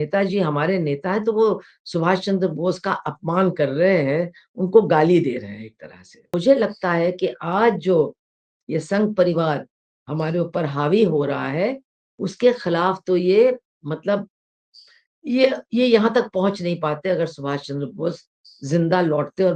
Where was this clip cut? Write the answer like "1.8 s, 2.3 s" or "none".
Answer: 6.3 s